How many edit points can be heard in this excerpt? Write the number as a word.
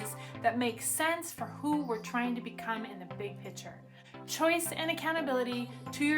one